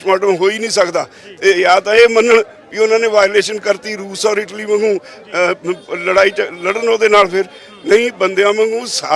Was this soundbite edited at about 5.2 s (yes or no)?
no